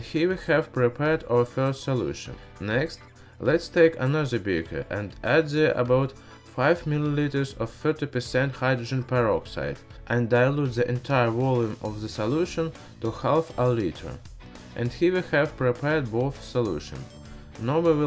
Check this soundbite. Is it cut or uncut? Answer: cut